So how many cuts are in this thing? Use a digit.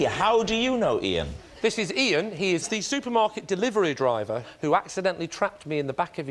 1